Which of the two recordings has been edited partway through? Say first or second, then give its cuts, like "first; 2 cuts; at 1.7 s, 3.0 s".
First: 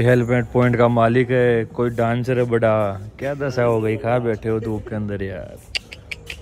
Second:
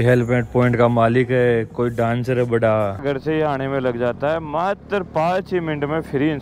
second; 1 cut; at 3.0 s